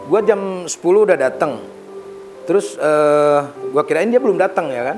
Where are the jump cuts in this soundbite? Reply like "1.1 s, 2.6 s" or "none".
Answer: none